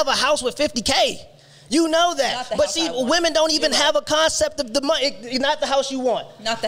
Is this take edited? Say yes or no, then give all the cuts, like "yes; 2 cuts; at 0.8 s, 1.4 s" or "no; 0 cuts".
no; 0 cuts